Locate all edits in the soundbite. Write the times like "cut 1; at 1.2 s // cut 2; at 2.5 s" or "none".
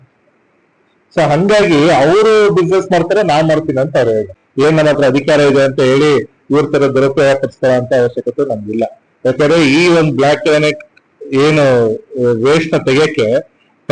cut 1; at 4.4 s

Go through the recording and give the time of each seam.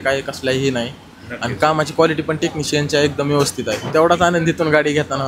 cut 1; at 3.9 s

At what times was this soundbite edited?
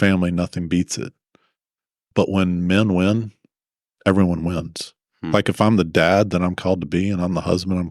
cut 1; at 2.1 s

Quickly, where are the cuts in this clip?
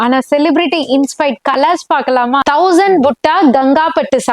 cut 1; at 2.4 s

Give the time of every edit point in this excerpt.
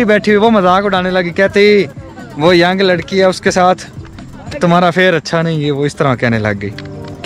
none

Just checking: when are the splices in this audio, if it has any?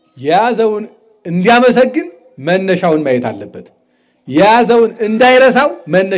none

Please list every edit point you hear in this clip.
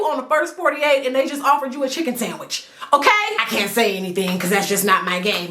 cut 1; at 3.4 s

